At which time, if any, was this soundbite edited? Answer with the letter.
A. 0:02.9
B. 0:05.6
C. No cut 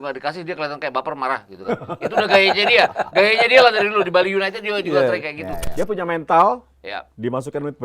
B